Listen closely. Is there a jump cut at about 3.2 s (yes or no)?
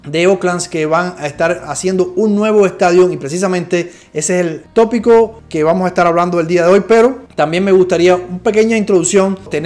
no